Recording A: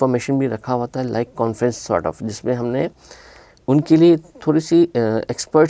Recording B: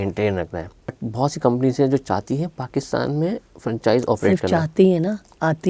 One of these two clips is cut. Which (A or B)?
B